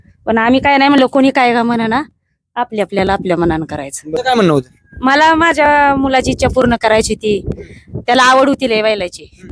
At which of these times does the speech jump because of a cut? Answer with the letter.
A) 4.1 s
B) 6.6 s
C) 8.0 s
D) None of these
A